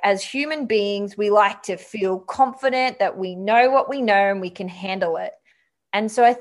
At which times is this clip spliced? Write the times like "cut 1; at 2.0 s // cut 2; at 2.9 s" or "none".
none

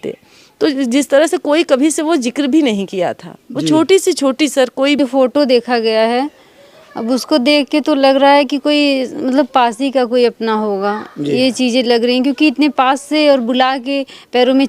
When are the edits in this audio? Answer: cut 1; at 5.0 s

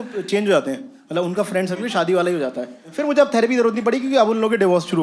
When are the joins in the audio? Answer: cut 1; at 2.9 s

